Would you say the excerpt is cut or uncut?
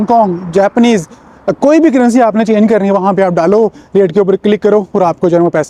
uncut